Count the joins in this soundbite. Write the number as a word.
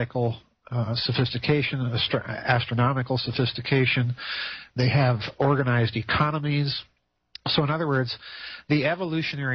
one